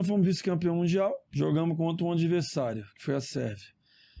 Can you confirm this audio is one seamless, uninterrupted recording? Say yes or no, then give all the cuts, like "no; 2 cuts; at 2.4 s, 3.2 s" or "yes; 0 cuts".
no; 1 cut; at 1.2 s